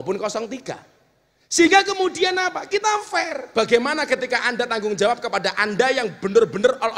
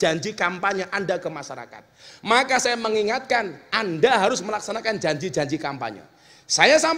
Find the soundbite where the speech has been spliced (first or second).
first